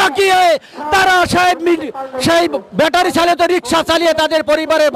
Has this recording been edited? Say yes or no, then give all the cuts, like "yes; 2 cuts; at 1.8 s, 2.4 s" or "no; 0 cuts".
no; 0 cuts